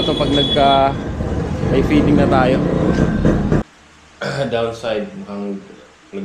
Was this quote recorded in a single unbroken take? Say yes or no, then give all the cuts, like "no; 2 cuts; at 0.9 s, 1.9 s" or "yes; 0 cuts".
no; 1 cut; at 3.6 s